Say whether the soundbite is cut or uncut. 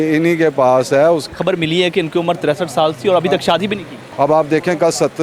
cut